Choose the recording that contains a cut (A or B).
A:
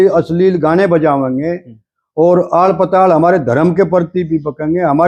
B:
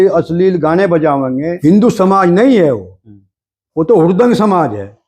B